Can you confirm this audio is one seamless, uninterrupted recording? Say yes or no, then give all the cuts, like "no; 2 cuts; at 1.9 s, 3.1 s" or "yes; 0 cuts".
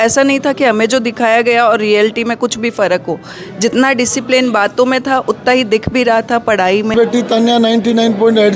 no; 1 cut; at 6.9 s